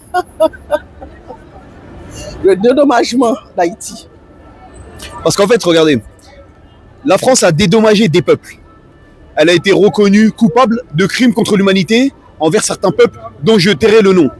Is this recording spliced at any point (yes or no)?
no